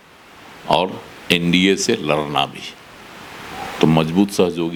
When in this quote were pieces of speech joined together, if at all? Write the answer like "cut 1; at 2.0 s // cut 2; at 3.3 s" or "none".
none